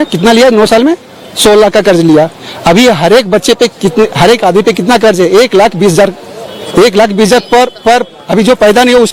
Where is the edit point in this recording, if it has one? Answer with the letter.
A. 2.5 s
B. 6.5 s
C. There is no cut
C